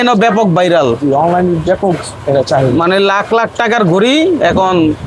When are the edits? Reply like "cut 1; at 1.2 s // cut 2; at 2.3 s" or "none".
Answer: none